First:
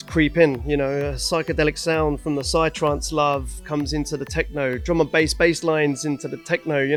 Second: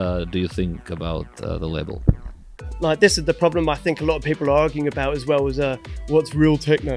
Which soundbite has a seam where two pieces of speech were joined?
second; 1 cut; at 2.6 s

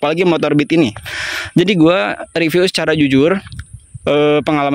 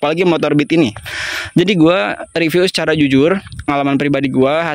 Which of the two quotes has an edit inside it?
second; 1 cut; at 3.7 s

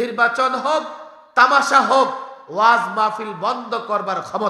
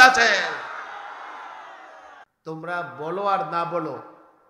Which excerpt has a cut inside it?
second; 1 cut; at 2.1 s

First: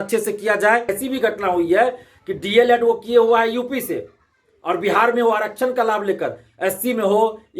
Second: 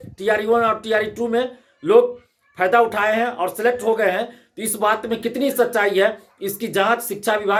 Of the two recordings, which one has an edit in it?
first; 1 cut; at 0.9 s

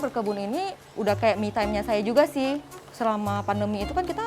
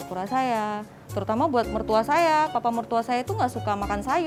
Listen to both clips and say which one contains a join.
first; 1 cut; at 2.8 s

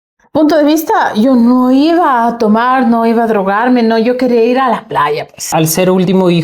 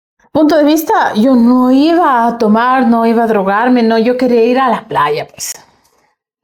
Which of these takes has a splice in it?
first; 1 cut; at 5.5 s

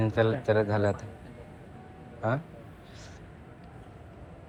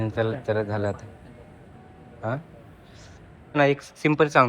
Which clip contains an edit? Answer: second; 1 cut; at 3.6 s

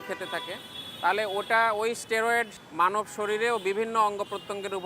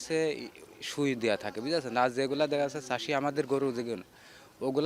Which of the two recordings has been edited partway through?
first; 1 cut; at 2.6 s

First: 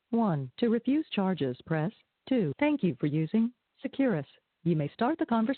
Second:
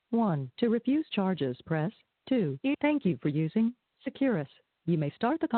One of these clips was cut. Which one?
first; 1 cut; at 2.6 s

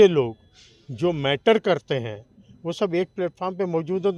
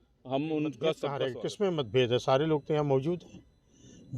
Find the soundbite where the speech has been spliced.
second; 1 cut; at 1.3 s

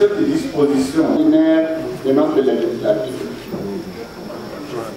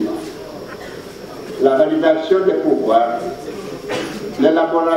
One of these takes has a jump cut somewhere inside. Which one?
first; 1 cut; at 1.2 s

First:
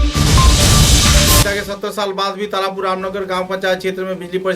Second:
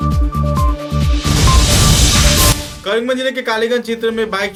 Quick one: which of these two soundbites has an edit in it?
first; 1 cut; at 1.4 s

